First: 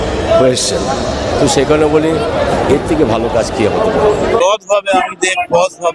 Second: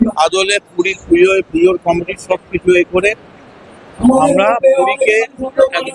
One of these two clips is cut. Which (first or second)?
first